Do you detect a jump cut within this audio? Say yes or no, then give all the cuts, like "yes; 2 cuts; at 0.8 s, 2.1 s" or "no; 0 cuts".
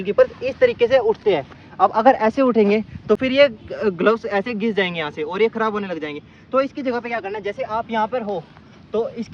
no; 0 cuts